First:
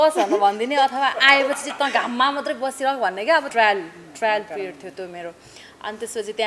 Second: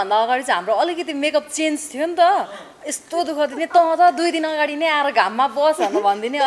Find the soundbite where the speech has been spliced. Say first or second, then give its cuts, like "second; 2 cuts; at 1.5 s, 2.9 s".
first; 1 cut; at 3.5 s